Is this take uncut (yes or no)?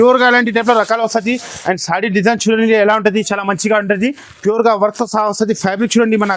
yes